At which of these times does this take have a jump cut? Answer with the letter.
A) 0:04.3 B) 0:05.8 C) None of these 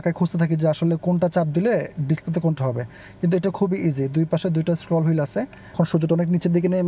B